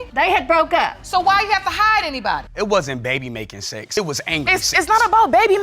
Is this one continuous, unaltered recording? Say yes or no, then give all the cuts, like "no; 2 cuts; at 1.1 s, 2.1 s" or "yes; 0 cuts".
no; 1 cut; at 2.4 s